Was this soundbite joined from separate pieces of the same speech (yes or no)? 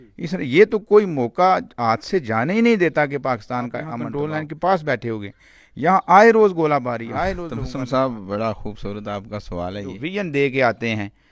yes